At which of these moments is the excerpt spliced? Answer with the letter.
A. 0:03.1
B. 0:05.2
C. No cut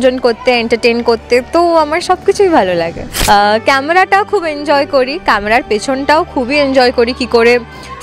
A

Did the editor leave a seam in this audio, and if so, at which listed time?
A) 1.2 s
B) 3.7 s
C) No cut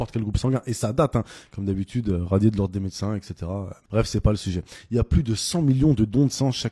B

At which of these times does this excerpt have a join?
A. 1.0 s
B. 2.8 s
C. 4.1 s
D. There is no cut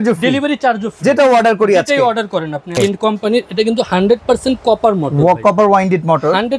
B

